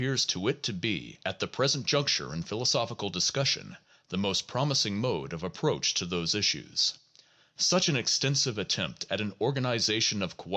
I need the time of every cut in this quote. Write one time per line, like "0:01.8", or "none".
0:06.3

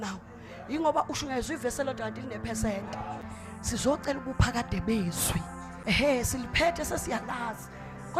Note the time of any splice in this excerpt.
0:03.2
0:05.7

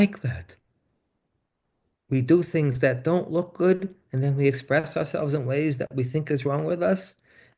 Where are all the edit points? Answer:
none

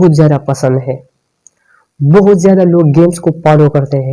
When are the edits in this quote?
none

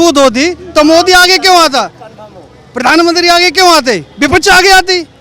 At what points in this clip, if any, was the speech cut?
none

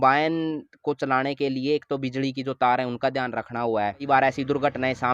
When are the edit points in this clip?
0:04.0

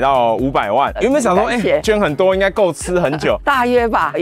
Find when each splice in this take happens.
0:01.0
0:01.8
0:03.4

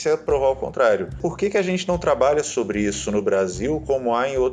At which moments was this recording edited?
0:01.3

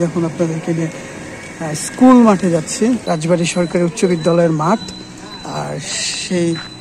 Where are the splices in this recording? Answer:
0:03.0

